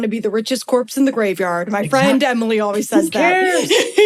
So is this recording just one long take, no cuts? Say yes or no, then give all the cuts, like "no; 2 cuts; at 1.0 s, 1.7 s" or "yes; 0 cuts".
yes; 0 cuts